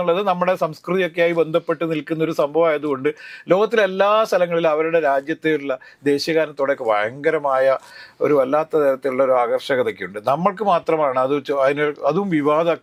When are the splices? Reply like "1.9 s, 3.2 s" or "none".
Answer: none